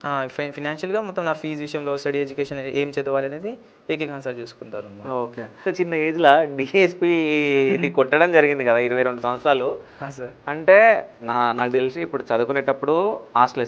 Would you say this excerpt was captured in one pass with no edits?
no; 1 cut; at 5.6 s

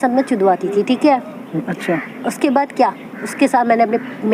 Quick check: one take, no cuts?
yes; 0 cuts

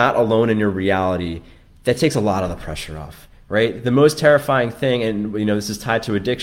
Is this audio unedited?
yes; 0 cuts

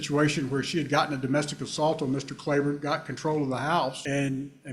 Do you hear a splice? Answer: no; 0 cuts

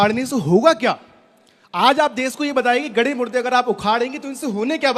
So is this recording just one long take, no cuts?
yes; 0 cuts

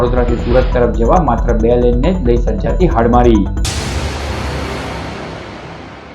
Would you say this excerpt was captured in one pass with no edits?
no; 1 cut; at 3.8 s

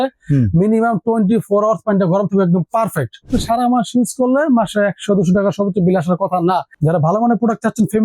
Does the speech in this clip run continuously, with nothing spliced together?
no; 2 cuts; at 3.3 s, 6.7 s

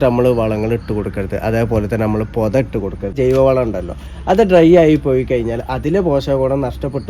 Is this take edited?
yes; 1 cut; at 3.1 s

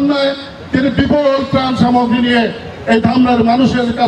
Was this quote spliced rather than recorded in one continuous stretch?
no; 0 cuts

